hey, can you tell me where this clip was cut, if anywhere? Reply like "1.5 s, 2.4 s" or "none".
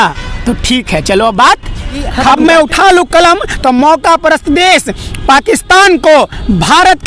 2.3 s